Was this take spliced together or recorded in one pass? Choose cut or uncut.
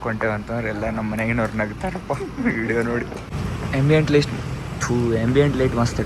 cut